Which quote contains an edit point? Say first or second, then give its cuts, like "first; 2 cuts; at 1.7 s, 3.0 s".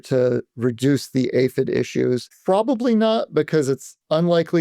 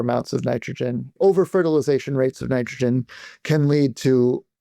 first; 1 cut; at 2.3 s